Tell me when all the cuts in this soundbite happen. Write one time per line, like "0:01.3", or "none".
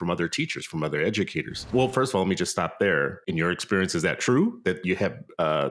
0:01.7
0:03.2